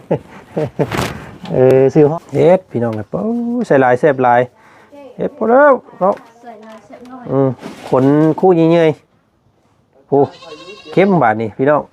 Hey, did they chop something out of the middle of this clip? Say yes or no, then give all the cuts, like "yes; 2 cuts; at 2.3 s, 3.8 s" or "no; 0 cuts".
yes; 1 cut; at 2.1 s